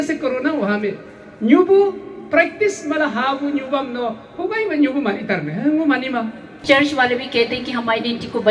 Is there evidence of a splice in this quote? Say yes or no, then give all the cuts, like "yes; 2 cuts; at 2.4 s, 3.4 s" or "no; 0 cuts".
yes; 1 cut; at 6.6 s